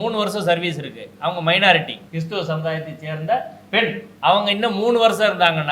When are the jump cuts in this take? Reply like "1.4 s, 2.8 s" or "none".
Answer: 2.0 s, 4.1 s